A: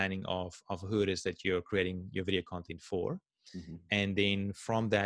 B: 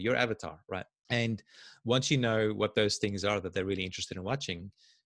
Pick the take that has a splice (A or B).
B